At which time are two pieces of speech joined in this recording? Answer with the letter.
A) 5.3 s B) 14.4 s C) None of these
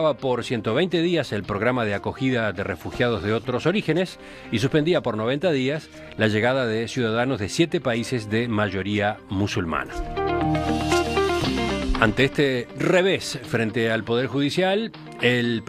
A